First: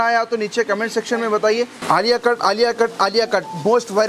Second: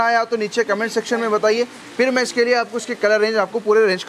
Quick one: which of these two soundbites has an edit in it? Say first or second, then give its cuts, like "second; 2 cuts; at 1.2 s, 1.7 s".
first; 1 cut; at 1.8 s